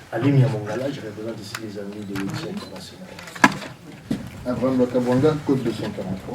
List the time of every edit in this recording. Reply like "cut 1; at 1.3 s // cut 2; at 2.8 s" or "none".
cut 1; at 3.9 s